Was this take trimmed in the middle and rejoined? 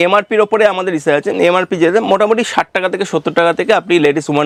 no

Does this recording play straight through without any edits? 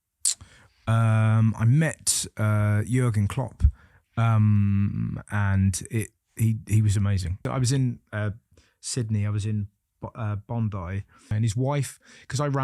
no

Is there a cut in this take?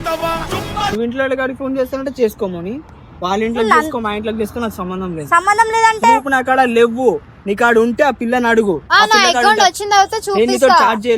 no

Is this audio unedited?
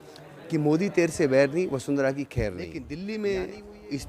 no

